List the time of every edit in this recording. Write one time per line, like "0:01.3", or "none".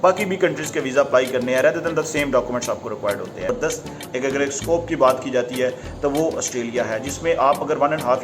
0:03.5

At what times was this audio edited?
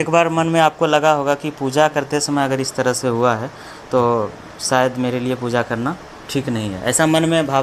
none

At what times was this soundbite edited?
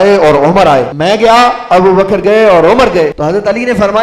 0:00.9
0:03.2

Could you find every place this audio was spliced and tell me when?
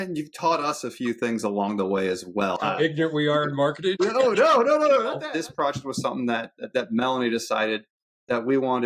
0:02.6
0:04.0
0:05.2

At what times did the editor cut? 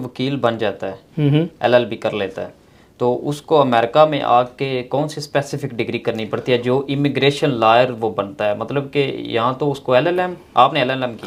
none

